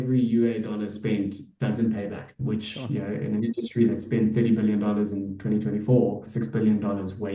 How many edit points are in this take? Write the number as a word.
two